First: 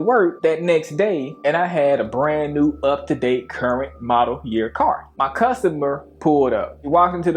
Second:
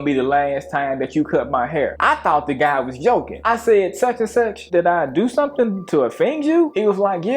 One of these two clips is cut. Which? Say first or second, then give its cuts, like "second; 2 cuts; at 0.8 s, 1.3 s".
second; 2 cuts; at 3.4 s, 4.7 s